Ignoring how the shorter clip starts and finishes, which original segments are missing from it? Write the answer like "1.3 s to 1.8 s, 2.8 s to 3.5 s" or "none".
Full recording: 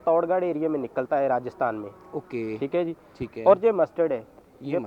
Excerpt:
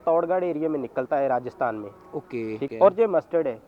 2.7 s to 3.3 s

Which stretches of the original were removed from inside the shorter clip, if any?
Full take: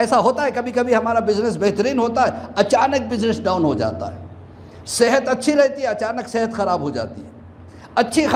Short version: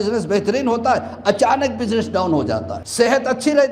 4.1 s to 4.8 s

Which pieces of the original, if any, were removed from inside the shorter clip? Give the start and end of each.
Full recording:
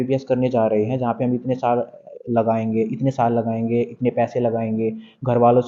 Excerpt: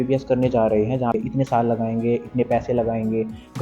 1.2 s to 2.8 s

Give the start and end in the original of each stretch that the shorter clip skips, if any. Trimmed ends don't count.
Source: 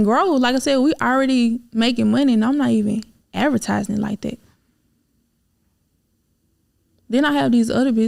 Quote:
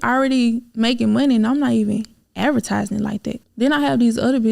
4.4 s to 7.0 s

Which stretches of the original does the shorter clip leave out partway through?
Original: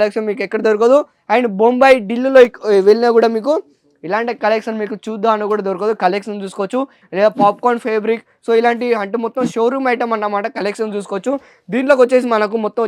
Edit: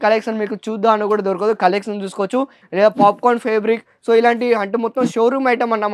none

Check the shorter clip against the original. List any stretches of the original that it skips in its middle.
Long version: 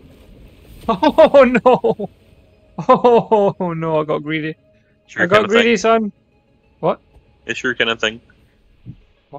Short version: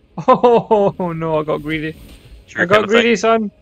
none

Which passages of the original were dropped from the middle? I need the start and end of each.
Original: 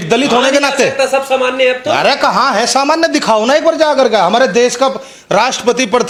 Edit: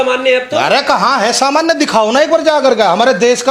none

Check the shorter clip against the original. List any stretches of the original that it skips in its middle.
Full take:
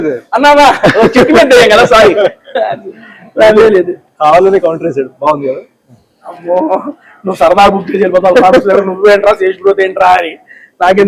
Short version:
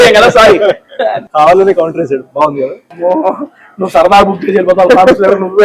2.8 s to 4.1 s, 5.7 s to 6.3 s

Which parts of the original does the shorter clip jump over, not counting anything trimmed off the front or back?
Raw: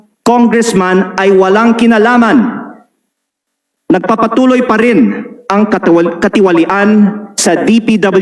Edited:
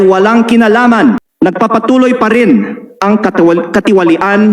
2.6 s to 3.7 s

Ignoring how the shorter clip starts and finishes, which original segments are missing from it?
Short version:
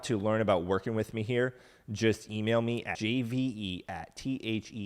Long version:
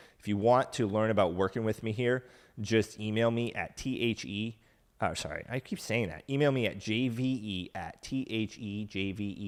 3.6 s to 6.8 s

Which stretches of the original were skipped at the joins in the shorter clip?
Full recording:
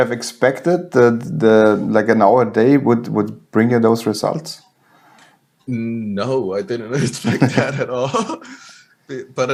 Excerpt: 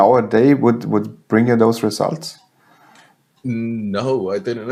none

